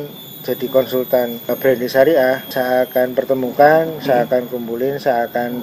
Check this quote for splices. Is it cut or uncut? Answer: cut